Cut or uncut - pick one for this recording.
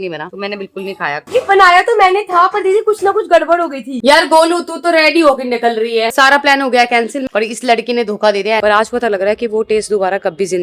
cut